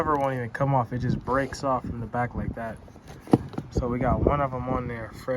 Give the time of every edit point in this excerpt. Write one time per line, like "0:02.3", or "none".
none